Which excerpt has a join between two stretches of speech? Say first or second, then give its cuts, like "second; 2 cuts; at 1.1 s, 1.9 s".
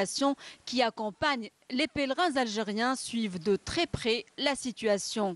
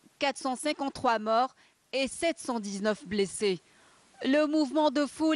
second; 1 cut; at 1.2 s